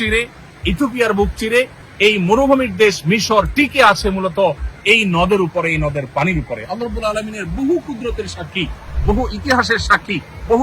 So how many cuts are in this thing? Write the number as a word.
one